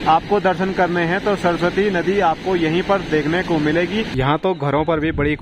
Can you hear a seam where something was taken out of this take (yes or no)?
yes